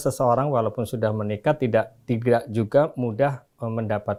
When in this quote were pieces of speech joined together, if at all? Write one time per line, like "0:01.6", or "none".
none